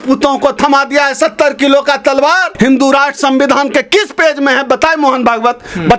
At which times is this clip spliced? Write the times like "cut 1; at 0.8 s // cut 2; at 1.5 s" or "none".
cut 1; at 2.5 s